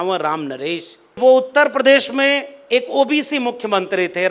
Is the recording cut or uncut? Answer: cut